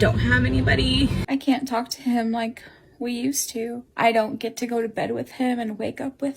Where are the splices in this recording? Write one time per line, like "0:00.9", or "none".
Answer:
0:01.2
0:03.8